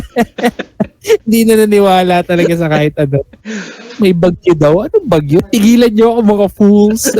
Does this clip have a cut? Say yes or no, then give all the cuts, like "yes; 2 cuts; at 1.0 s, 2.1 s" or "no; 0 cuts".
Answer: yes; 1 cut; at 5.4 s